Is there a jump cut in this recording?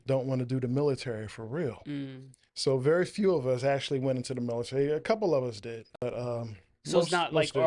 yes; 1 cut; at 6.0 s

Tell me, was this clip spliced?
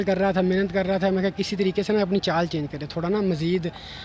no; 0 cuts

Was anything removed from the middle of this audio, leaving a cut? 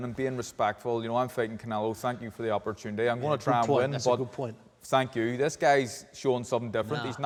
no; 0 cuts

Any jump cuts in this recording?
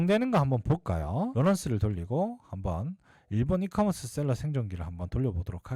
no; 0 cuts

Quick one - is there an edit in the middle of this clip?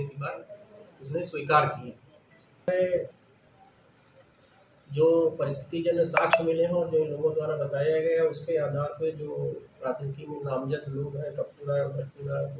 yes; 1 cut; at 2.7 s

